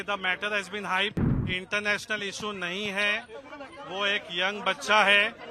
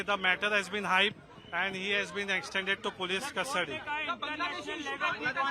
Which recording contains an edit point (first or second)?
first